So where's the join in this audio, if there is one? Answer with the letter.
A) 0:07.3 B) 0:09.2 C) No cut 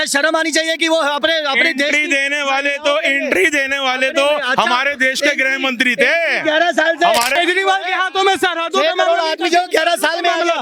A